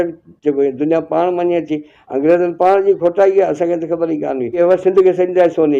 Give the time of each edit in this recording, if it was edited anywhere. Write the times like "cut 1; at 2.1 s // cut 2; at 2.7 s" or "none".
cut 1; at 4.6 s